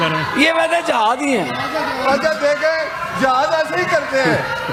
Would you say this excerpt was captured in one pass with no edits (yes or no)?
yes